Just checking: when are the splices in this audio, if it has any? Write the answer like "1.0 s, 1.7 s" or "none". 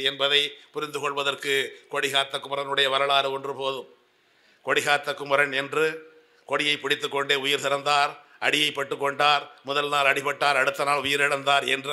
none